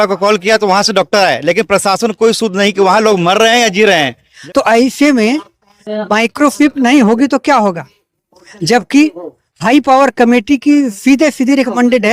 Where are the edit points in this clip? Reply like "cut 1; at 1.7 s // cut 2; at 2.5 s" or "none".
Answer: cut 1; at 4.3 s